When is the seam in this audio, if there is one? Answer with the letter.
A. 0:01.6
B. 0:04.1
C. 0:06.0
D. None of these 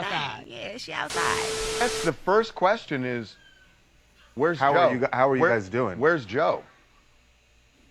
A